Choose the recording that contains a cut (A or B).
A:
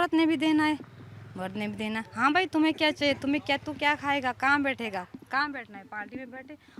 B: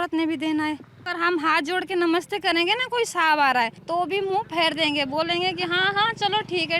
B